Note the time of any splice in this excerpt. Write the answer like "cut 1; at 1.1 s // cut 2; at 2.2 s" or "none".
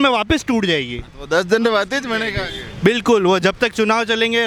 none